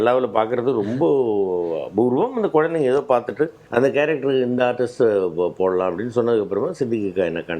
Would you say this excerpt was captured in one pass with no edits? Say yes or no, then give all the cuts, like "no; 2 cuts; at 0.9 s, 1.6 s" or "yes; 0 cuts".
no; 1 cut; at 3.6 s